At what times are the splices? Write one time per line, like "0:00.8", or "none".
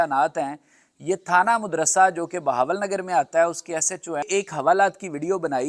0:04.3